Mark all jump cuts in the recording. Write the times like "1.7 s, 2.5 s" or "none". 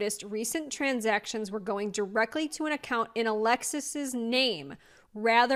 none